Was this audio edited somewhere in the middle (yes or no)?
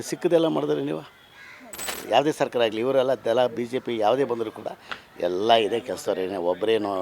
yes